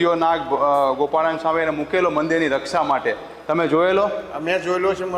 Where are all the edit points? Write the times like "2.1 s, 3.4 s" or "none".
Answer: none